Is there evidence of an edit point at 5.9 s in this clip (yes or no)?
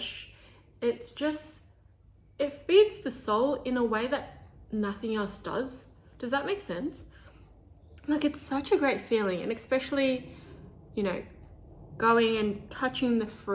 no